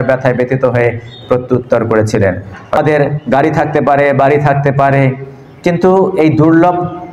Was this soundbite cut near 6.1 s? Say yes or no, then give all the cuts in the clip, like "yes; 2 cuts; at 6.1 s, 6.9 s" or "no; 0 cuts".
no; 1 cut; at 2.8 s